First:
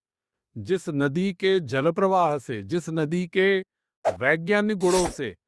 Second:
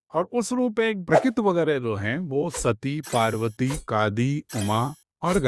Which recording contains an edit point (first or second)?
second